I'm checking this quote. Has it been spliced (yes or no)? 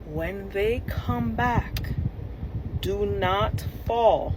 no